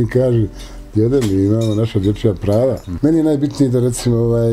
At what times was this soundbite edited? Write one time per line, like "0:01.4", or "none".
0:02.9